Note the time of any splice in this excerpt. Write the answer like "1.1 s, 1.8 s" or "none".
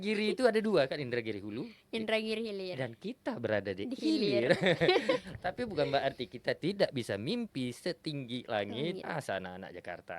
9.0 s